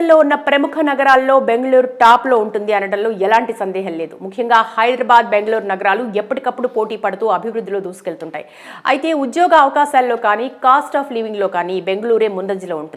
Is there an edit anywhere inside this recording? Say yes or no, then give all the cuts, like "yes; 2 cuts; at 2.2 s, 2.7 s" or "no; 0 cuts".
no; 0 cuts